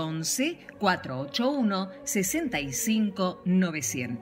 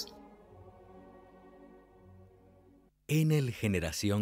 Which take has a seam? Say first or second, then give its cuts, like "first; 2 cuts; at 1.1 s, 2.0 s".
second; 1 cut; at 3.0 s